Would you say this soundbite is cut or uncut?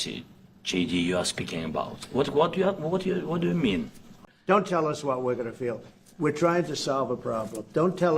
cut